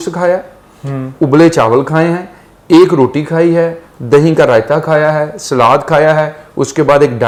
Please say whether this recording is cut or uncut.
uncut